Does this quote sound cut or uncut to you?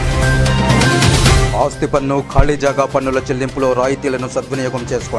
cut